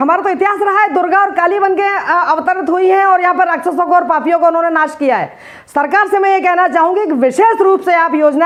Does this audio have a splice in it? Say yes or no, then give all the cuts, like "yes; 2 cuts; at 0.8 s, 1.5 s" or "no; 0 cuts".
no; 0 cuts